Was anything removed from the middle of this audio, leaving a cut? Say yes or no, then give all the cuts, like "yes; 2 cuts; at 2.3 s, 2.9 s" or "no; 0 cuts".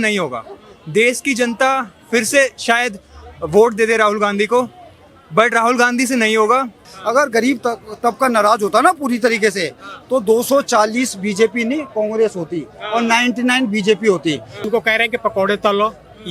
yes; 2 cuts; at 6.9 s, 14.5 s